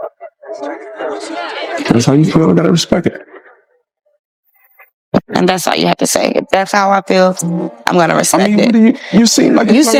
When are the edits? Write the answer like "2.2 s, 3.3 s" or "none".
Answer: none

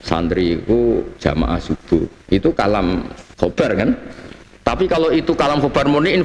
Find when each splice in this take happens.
1.1 s, 3.2 s

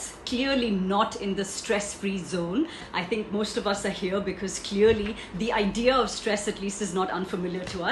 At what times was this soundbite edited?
2.8 s

